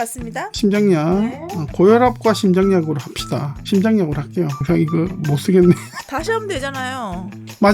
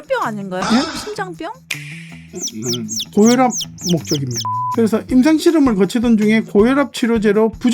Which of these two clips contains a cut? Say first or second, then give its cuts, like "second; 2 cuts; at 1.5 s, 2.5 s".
second; 2 cuts; at 2.2 s, 4.4 s